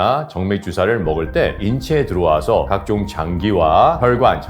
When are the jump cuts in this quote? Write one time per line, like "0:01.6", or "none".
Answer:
none